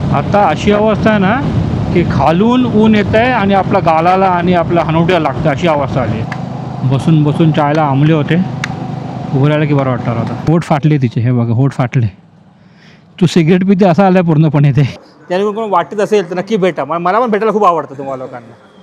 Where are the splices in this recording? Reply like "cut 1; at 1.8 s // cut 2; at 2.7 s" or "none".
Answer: cut 1; at 6.2 s // cut 2; at 10.4 s // cut 3; at 15.0 s